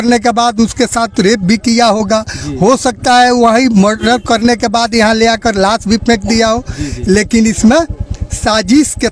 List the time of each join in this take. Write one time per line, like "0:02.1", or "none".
none